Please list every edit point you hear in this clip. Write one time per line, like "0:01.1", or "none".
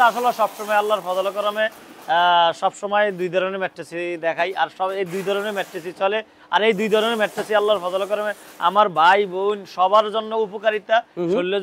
none